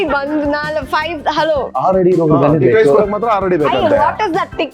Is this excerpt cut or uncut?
cut